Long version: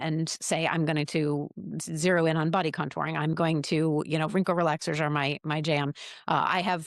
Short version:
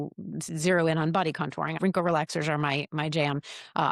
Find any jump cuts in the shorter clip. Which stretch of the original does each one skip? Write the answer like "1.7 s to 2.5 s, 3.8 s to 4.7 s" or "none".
3.2 s to 4.3 s